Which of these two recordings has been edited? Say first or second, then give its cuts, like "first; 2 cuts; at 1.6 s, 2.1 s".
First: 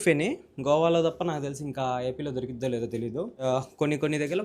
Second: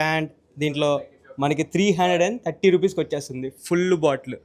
first; 1 cut; at 3.4 s